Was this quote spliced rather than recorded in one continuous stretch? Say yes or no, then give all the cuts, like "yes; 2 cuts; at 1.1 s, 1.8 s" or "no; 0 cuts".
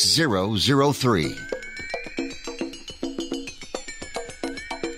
yes; 1 cut; at 1.2 s